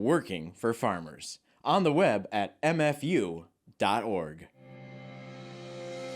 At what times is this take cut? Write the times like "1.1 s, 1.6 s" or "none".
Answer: 4.6 s